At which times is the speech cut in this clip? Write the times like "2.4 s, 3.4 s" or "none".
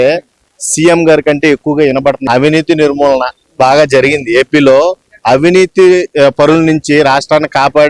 2.2 s